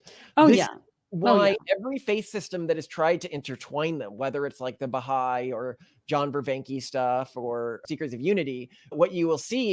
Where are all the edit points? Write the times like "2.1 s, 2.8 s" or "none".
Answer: 7.8 s